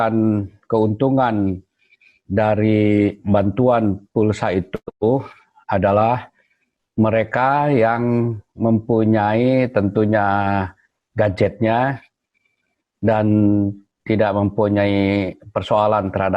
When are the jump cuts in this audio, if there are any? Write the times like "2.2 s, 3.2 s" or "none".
none